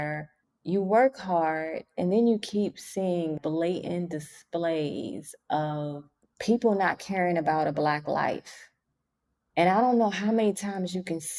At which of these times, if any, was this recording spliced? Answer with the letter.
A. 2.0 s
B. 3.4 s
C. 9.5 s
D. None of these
B